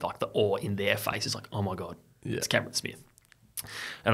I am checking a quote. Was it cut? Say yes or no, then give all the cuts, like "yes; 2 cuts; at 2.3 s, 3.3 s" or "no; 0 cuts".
no; 0 cuts